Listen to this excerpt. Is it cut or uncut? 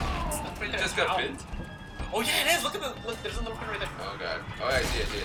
uncut